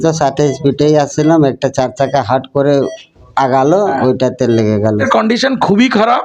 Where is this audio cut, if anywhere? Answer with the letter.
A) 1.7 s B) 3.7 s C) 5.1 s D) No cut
C